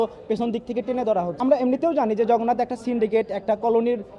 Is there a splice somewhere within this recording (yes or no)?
yes